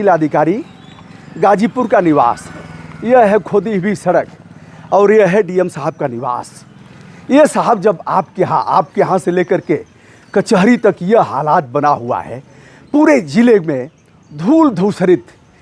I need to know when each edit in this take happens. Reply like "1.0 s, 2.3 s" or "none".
none